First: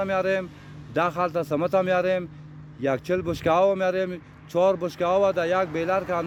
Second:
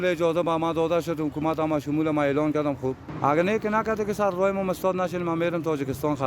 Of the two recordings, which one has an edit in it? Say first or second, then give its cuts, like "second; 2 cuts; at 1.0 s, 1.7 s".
second; 1 cut; at 3.1 s